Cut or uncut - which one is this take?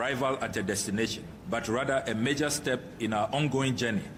uncut